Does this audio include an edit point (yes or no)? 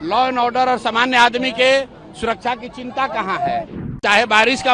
yes